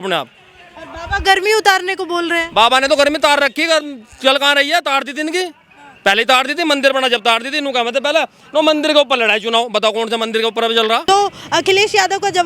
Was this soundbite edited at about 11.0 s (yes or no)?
yes